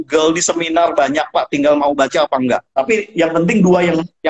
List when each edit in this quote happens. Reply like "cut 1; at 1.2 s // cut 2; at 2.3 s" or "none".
cut 1; at 2.7 s